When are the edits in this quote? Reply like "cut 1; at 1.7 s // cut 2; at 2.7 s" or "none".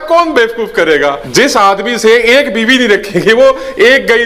cut 1; at 1.2 s